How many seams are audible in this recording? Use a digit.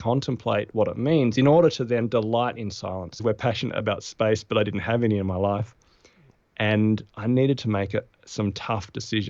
1